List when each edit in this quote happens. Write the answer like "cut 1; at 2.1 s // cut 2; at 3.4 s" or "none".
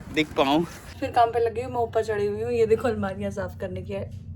cut 1; at 1.0 s